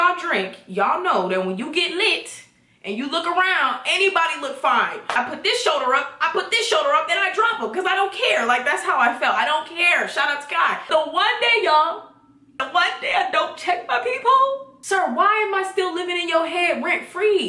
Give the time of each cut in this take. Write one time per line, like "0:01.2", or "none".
0:05.1
0:10.9
0:12.5
0:14.7